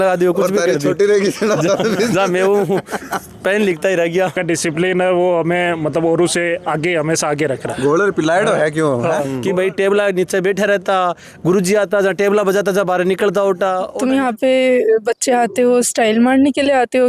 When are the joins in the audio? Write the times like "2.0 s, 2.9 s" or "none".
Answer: 4.4 s, 9.3 s, 13.9 s